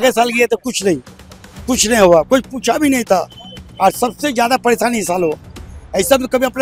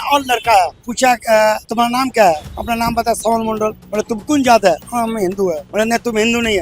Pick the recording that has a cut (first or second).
second